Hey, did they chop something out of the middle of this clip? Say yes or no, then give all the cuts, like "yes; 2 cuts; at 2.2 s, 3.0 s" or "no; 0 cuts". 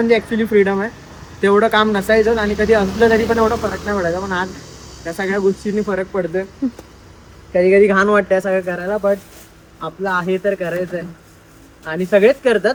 no; 0 cuts